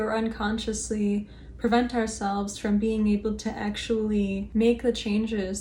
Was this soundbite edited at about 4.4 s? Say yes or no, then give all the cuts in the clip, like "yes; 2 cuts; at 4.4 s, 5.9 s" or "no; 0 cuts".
yes; 1 cut; at 4.4 s